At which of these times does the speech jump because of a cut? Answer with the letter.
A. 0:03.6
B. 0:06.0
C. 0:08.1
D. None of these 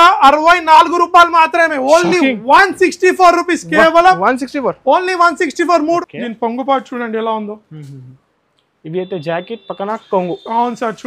B